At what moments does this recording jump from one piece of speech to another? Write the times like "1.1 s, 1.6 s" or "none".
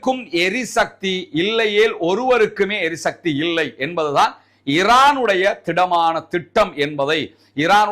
none